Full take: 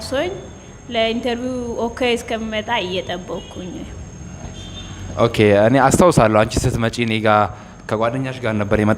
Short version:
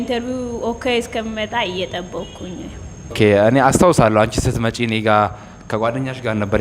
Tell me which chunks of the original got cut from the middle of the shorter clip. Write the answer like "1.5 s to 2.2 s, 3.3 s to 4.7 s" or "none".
4.3 s to 5.3 s